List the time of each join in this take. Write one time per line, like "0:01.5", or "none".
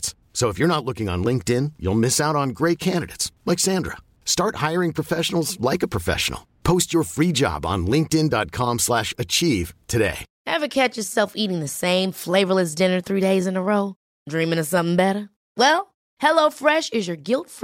0:10.3